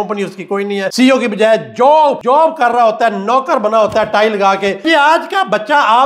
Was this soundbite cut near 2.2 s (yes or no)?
yes